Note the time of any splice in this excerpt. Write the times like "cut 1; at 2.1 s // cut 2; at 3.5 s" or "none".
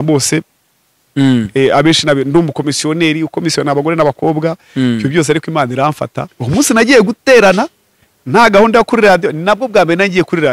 cut 1; at 6.3 s